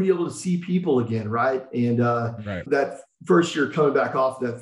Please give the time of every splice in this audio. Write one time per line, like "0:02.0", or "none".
0:02.6

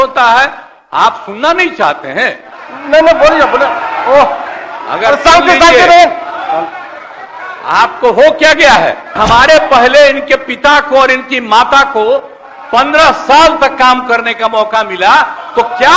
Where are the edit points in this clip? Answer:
0:09.2

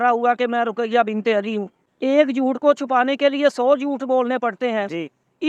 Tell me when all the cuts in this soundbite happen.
0:01.9

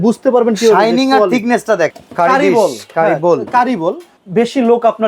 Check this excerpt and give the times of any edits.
0:01.9
0:04.1

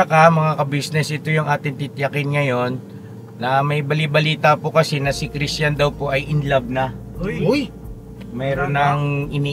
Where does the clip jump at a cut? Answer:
none

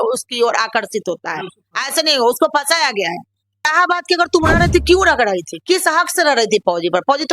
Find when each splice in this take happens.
0:03.6

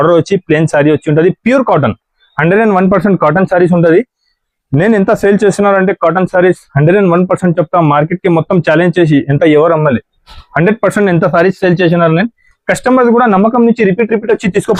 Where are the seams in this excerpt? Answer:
none

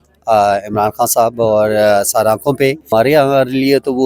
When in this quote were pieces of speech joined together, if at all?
0:02.9

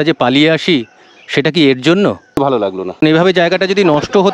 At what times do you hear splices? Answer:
0:02.3

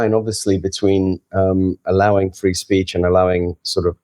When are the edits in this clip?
none

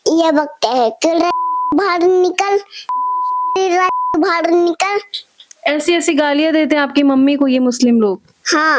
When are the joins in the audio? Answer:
none

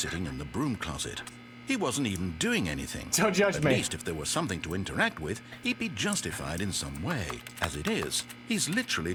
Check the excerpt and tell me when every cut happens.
none

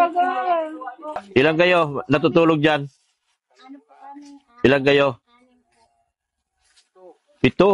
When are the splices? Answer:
0:01.2

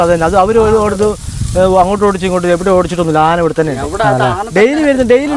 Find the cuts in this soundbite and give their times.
none

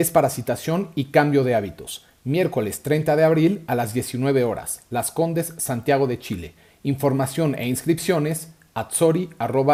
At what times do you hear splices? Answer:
none

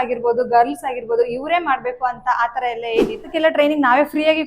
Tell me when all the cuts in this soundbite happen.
0:03.3

